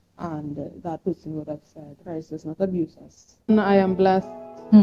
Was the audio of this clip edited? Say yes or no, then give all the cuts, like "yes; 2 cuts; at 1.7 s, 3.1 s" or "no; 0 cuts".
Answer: yes; 1 cut; at 3.5 s